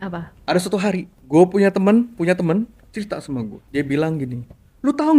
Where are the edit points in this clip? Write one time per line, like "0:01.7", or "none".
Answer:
0:01.1
0:03.6